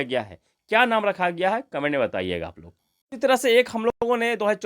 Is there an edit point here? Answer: yes; 1 cut; at 2.6 s

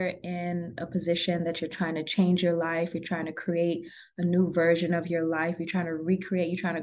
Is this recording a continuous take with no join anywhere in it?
yes; 0 cuts

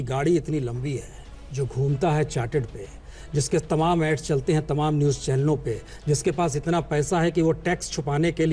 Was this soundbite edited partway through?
no; 0 cuts

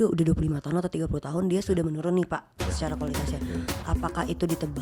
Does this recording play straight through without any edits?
yes; 0 cuts

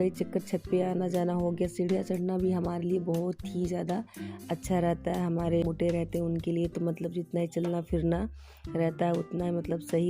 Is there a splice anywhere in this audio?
yes; 1 cut; at 5.7 s

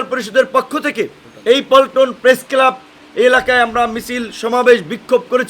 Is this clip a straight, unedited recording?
no; 1 cut; at 1.2 s

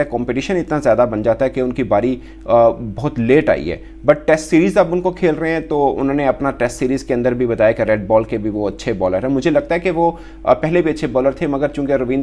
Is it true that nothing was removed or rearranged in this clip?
yes; 0 cuts

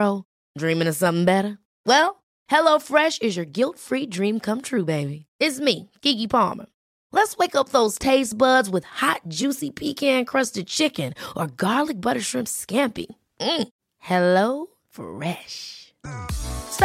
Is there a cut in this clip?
no; 0 cuts

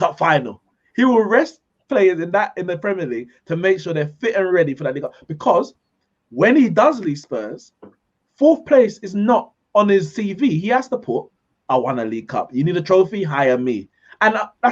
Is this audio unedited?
yes; 0 cuts

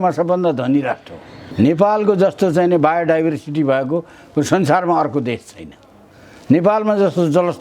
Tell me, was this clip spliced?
yes; 1 cut; at 1.5 s

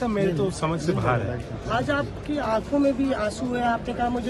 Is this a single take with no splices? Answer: yes; 0 cuts

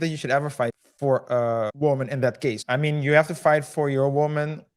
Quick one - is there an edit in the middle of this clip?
yes; 3 cuts; at 0.8 s, 1.7 s, 2.6 s

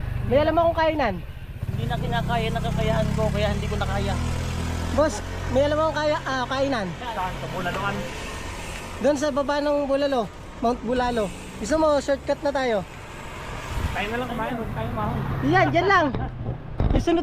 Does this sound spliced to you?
no; 0 cuts

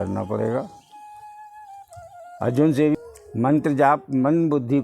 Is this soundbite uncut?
no; 1 cut; at 2.9 s

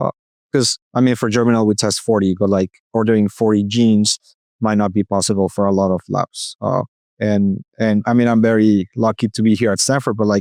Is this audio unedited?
yes; 0 cuts

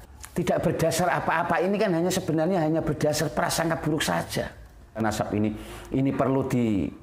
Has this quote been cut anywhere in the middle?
yes; 1 cut; at 5.0 s

